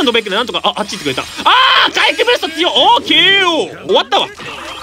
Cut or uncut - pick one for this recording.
cut